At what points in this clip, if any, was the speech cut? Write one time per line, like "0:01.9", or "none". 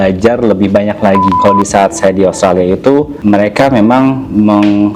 0:01.4